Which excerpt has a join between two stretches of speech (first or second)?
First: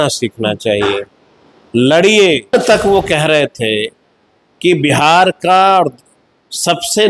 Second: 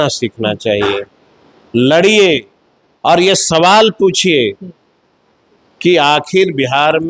first